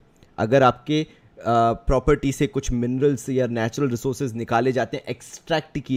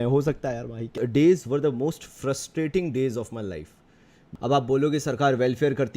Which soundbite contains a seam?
second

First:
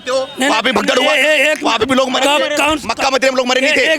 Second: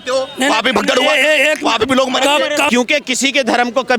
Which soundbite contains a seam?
second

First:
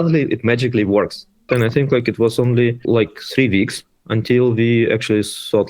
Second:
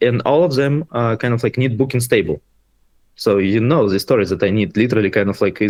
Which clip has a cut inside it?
first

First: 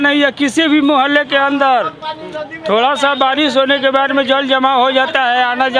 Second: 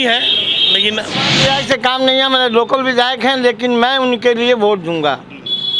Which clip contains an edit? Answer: second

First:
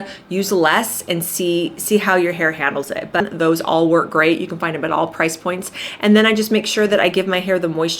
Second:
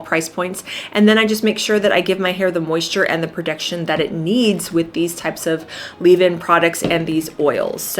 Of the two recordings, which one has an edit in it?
first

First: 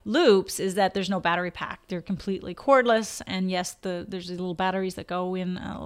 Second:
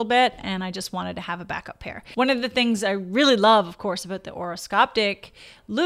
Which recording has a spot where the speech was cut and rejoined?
second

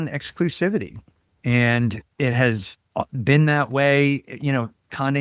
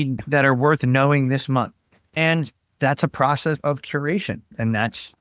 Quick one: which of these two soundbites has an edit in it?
second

